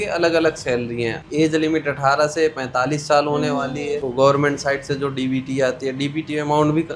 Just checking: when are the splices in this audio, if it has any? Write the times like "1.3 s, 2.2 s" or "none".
1.2 s, 4.1 s